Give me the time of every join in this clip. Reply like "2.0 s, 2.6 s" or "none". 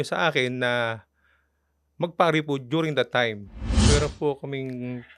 3.8 s